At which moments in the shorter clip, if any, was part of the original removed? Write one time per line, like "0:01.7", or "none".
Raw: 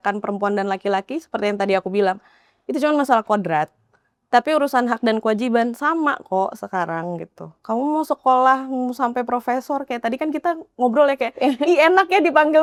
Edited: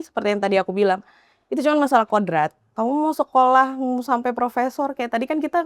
0:02.6